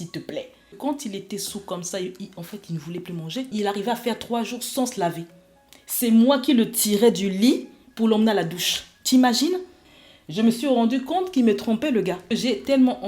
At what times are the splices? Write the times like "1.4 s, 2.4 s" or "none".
0.8 s, 3.5 s, 9.8 s, 12.3 s